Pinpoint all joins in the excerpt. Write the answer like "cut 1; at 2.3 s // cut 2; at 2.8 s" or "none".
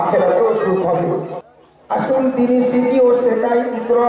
cut 1; at 1.4 s